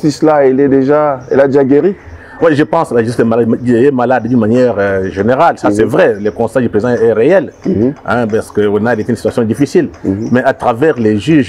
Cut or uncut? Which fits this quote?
uncut